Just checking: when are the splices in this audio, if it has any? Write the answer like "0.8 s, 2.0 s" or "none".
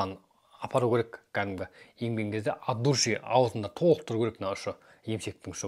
none